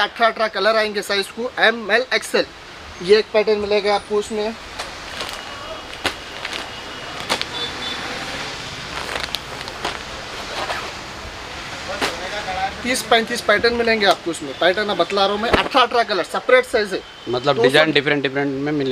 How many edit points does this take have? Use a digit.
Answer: 0